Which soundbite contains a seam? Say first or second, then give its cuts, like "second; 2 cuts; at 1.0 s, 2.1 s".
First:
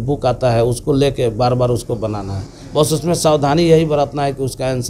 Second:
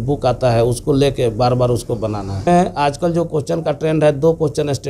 second; 1 cut; at 2.5 s